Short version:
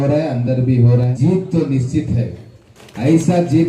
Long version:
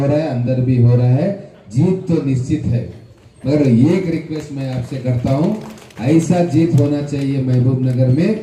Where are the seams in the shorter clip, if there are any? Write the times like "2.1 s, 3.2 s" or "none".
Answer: 1.1 s, 2.7 s